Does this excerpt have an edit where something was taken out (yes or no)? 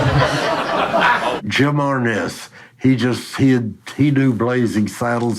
yes